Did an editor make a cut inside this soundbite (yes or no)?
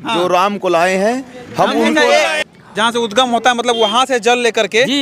yes